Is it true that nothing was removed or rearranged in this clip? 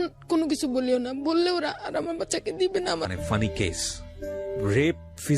no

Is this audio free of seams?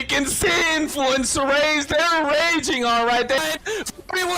no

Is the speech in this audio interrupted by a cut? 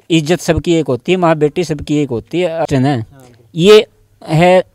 yes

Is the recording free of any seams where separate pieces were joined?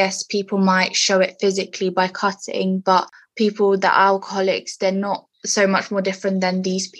yes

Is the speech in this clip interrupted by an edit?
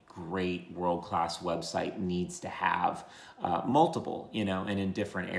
no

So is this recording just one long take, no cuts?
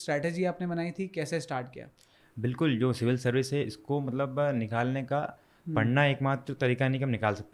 yes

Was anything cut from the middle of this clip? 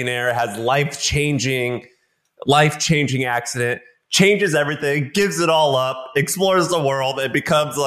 no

